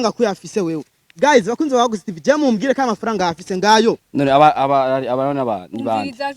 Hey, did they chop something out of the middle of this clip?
yes; 1 cut; at 4.0 s

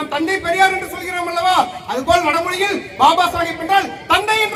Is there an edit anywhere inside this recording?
no; 0 cuts

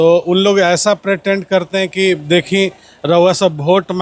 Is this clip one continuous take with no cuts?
yes; 0 cuts

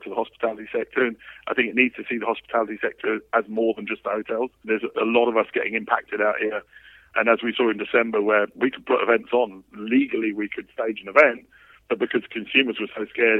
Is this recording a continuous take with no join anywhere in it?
no; 2 cuts; at 4.6 s, 7.1 s

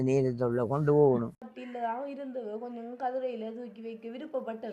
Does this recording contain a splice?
yes; 1 cut; at 1.5 s

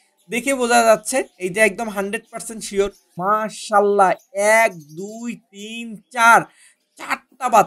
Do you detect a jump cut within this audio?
yes; 1 cut; at 3.1 s

